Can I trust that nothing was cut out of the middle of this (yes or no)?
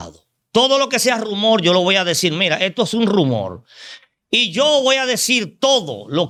yes